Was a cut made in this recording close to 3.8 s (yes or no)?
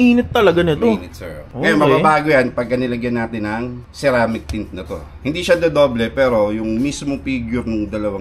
no